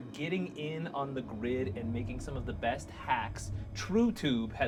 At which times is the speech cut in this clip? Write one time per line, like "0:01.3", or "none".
none